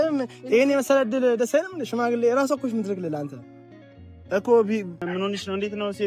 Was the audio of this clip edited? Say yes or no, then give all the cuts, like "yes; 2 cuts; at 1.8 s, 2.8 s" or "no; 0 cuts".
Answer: yes; 1 cut; at 5.0 s